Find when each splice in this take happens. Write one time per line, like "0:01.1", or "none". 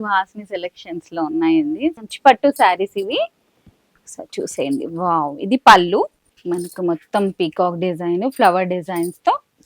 0:02.0